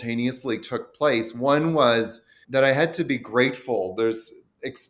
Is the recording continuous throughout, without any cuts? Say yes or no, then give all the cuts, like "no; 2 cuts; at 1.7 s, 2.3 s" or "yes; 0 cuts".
yes; 0 cuts